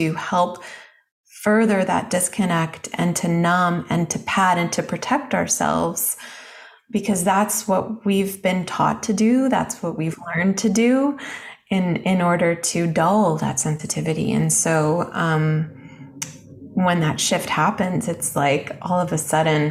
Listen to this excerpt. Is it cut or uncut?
uncut